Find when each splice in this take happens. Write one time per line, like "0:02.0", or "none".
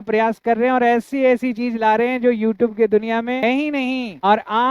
0:03.6